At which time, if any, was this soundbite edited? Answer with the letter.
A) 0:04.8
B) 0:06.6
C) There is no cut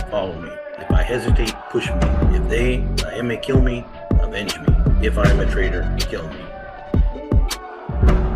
B